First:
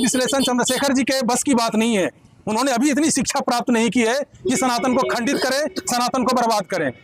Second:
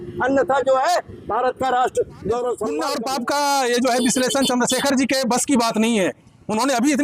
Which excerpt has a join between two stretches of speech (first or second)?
second